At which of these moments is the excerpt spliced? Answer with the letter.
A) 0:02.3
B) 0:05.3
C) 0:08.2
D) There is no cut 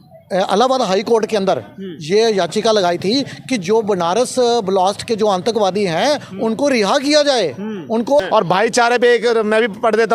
C